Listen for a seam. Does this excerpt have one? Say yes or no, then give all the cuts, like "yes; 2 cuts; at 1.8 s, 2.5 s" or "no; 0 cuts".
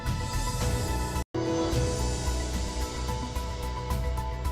yes; 1 cut; at 1.2 s